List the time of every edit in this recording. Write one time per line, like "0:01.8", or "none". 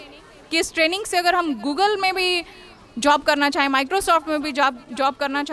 none

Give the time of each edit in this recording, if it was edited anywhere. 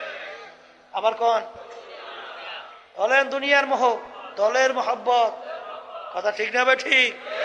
0:01.6
0:04.2

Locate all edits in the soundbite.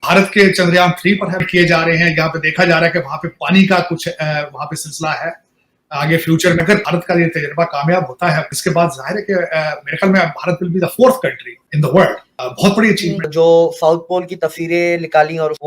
0:01.5
0:06.6
0:13.3

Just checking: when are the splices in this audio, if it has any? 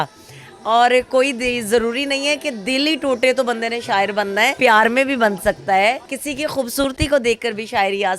0:04.5
0:06.1

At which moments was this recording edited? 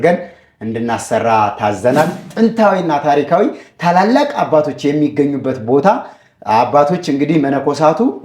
0:02.3

